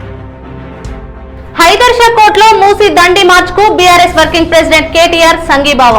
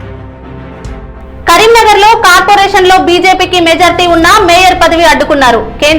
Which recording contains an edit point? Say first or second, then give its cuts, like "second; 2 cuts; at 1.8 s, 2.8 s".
second; 1 cut; at 1.4 s